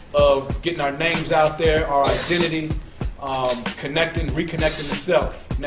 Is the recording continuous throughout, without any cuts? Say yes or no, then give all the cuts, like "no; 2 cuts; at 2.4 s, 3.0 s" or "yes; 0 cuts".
no; 1 cut; at 2.7 s